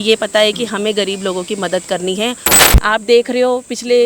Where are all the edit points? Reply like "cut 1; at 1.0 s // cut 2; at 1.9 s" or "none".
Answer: cut 1; at 2.5 s